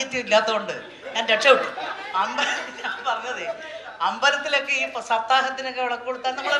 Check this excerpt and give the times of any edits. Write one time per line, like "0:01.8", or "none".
0:02.0

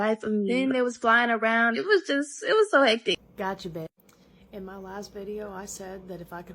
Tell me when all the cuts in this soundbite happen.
0:03.2

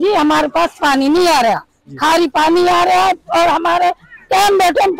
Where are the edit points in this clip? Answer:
none

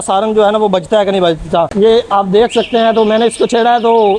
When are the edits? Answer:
none

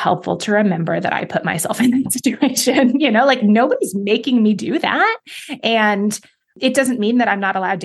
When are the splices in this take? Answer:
0:06.5

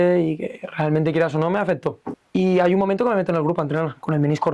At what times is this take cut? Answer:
0:02.1

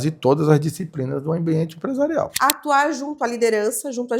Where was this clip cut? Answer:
0:02.3

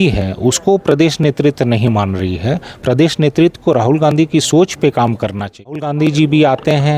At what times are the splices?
0:05.6

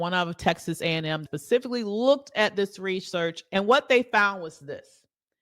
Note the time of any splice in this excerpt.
0:01.2
0:03.4

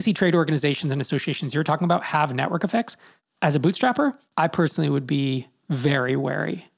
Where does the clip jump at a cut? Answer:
none

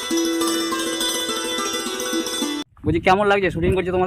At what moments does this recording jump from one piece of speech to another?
0:02.5

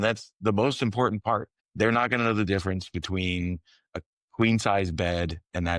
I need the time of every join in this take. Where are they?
0:01.6

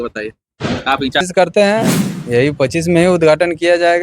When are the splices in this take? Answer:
0:01.2

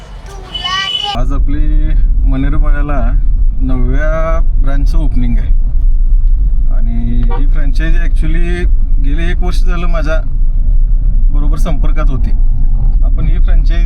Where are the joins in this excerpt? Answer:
0:01.2
0:12.9

